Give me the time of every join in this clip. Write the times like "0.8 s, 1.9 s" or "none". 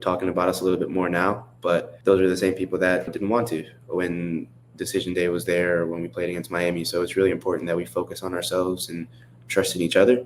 1.9 s, 3.1 s